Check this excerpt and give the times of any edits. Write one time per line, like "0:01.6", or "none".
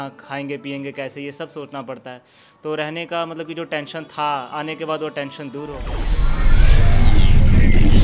0:05.9